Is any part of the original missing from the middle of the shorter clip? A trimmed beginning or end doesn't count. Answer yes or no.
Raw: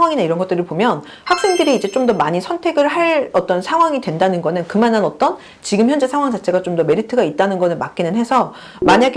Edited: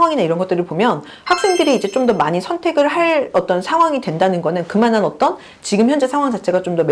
no